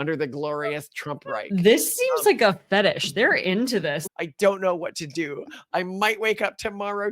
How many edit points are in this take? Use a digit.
1